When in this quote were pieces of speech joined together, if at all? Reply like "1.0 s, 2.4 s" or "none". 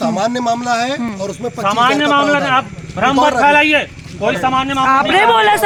none